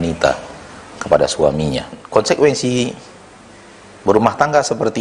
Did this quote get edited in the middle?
yes; 1 cut; at 2.0 s

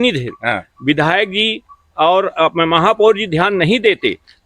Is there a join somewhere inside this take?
no; 0 cuts

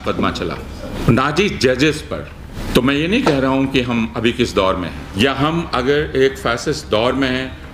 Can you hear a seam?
yes; 3 cuts; at 0.9 s, 2.5 s, 5.0 s

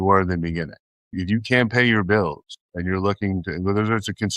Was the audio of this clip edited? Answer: yes; 1 cut; at 1.2 s

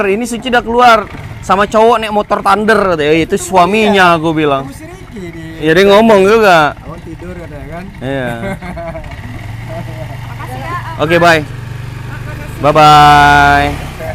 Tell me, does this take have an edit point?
no; 0 cuts

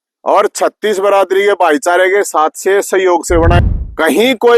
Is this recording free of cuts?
no; 1 cut; at 3.6 s

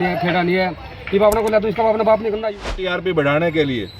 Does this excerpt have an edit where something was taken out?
yes; 1 cut; at 2.9 s

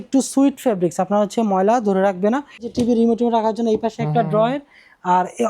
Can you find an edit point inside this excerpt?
yes; 1 cut; at 2.7 s

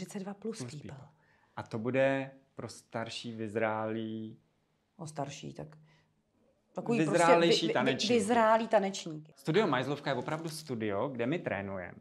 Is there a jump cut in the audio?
yes; 1 cut; at 9.4 s

